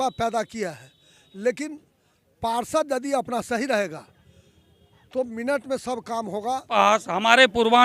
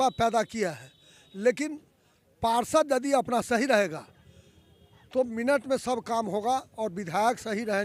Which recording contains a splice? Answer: first; 1 cut; at 6.8 s

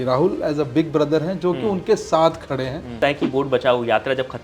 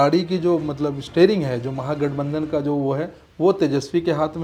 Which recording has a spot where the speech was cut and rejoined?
first; 1 cut; at 3.0 s

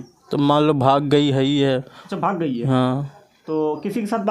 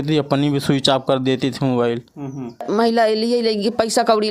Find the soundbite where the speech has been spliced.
second; 1 cut; at 2.7 s

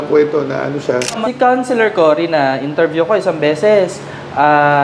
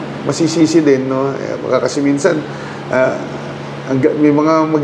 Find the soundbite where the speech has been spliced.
first; 1 cut; at 1.2 s

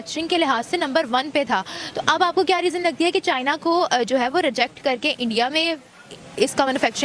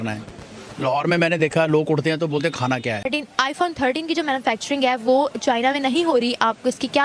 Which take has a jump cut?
second; 1 cut; at 3.1 s

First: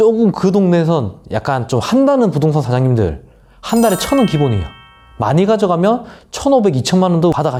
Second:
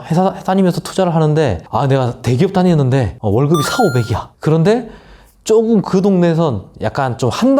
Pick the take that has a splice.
second; 3 cuts; at 1.6 s, 3.1 s, 4.2 s

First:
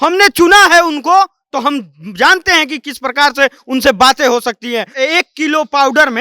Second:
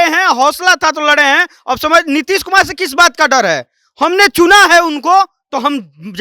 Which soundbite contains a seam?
first; 1 cut; at 4.9 s

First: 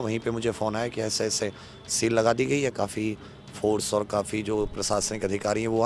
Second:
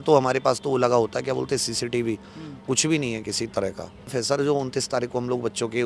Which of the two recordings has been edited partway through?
second; 1 cut; at 4.1 s

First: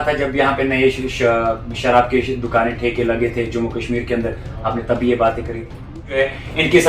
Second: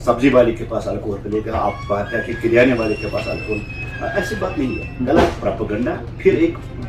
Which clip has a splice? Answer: first; 1 cut; at 5.9 s

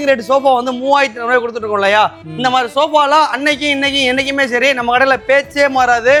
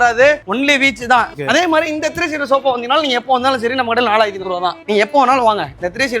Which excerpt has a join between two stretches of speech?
second; 1 cut; at 1.3 s

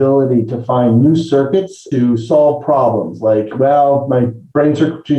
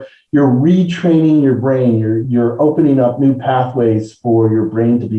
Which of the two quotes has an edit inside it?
second; 1 cut; at 2.2 s

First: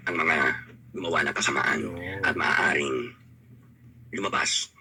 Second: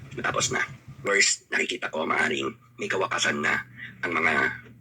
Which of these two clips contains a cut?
second; 1 cut; at 1.0 s

